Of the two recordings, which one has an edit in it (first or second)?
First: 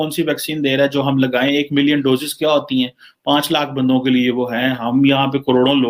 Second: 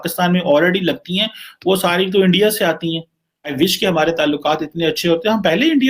second